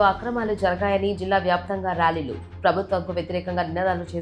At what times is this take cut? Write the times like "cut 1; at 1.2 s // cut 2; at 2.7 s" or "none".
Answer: none